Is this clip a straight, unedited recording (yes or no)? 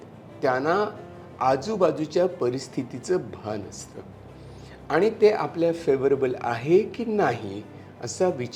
yes